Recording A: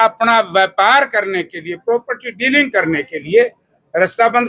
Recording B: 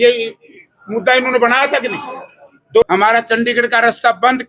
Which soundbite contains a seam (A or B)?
B